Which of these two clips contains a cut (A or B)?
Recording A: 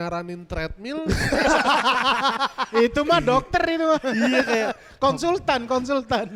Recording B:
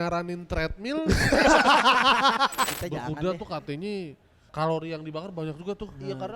B